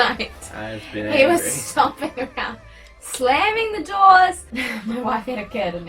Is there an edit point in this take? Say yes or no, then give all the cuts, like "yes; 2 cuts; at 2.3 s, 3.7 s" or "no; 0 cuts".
yes; 1 cut; at 4.5 s